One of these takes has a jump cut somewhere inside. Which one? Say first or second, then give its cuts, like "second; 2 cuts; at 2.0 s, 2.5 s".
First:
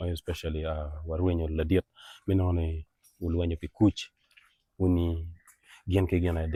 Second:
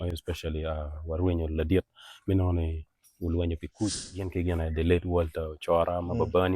second; 1 cut; at 4.3 s